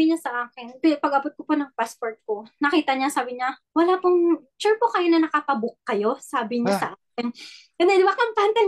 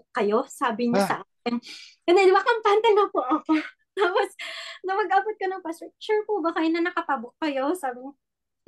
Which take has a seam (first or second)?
first